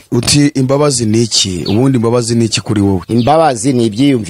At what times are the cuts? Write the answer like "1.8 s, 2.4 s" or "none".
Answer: none